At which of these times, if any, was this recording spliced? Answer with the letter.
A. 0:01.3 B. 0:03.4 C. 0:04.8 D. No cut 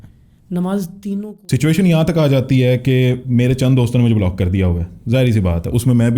A